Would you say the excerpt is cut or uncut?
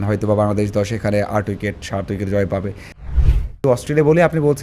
cut